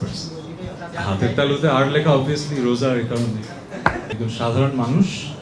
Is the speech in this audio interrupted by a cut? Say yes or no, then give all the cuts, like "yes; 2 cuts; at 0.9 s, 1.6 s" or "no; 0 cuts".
yes; 2 cuts; at 0.9 s, 4.1 s